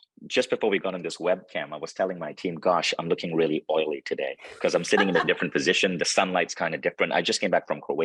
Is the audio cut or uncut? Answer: uncut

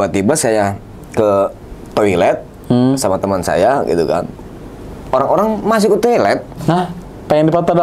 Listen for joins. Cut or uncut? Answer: uncut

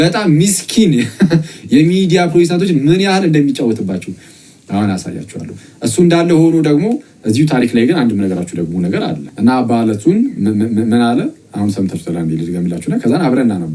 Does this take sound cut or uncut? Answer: cut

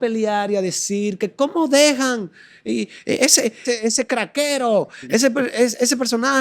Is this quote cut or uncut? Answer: cut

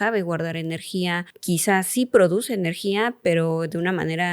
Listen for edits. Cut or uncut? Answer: cut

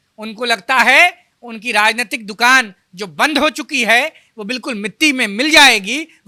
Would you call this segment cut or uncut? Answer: uncut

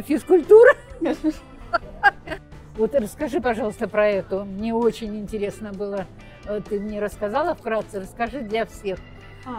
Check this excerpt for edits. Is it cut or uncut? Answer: cut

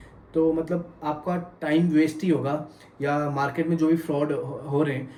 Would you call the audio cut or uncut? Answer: uncut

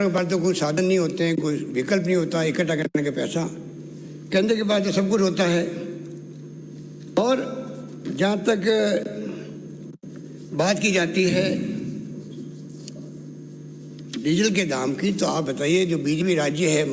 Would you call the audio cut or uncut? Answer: uncut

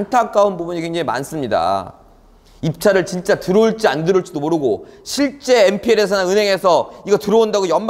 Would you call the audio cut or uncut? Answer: uncut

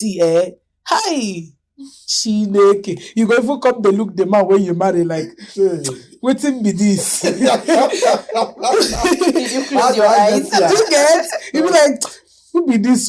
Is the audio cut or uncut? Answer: uncut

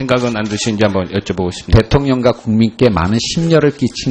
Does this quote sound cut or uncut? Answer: cut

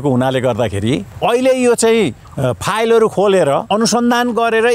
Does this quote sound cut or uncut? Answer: cut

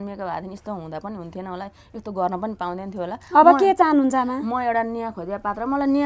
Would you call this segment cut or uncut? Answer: uncut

